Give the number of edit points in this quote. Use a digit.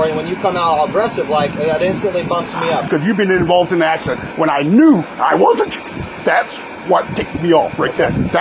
1